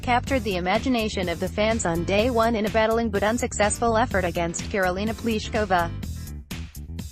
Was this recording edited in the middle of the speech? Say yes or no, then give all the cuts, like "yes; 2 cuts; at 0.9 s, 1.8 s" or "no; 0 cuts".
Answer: yes; 1 cut; at 5.9 s